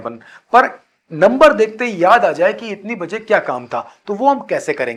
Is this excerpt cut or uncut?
uncut